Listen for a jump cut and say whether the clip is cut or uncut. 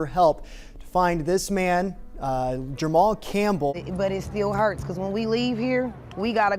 cut